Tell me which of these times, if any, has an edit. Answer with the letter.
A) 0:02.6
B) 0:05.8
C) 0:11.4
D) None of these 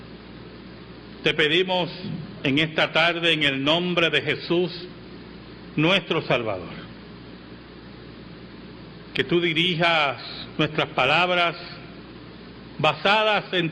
A